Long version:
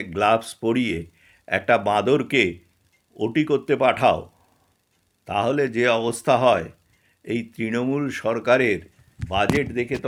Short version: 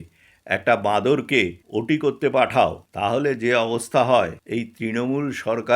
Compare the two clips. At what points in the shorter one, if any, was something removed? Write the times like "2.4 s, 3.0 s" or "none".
1.6 s, 2.9 s, 4.4 s